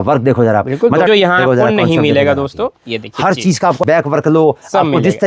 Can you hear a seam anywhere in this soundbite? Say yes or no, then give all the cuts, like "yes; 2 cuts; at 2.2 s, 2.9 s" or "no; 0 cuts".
yes; 2 cuts; at 1.1 s, 3.8 s